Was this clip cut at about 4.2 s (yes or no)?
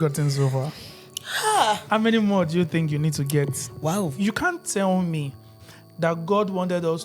yes